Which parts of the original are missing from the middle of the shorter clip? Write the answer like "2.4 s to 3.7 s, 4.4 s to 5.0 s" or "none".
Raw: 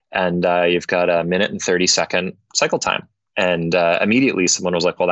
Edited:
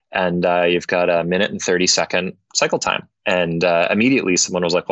3.1 s to 3.2 s